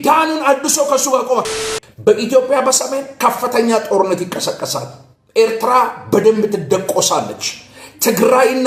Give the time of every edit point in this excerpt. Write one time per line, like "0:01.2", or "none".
0:01.6